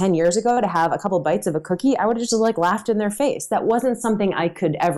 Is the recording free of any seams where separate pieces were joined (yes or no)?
yes